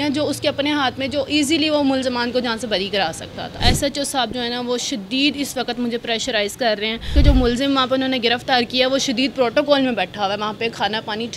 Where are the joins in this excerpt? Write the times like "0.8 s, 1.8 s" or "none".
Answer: 3.6 s, 7.1 s